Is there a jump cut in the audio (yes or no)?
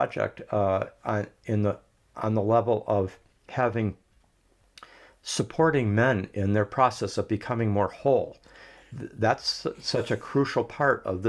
no